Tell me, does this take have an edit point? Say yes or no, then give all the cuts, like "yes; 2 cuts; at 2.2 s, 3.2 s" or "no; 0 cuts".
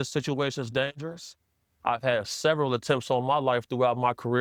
no; 0 cuts